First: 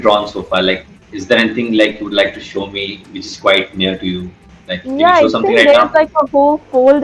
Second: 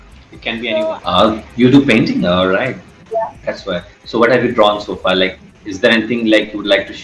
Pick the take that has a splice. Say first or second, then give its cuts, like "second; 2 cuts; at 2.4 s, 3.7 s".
second; 1 cut; at 0.9 s